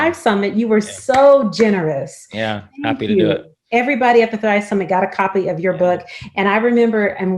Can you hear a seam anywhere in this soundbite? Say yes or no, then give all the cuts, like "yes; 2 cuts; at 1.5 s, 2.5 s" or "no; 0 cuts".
no; 0 cuts